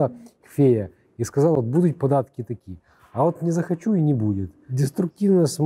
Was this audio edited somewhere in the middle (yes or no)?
yes